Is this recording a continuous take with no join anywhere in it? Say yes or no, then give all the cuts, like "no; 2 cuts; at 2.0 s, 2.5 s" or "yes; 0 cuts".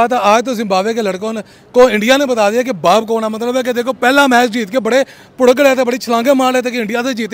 yes; 0 cuts